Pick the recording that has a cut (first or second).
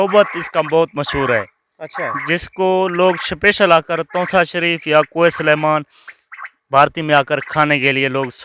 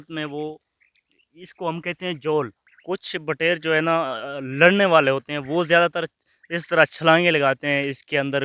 second